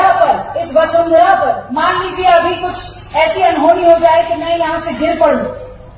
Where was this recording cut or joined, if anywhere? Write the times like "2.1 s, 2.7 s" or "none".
1.7 s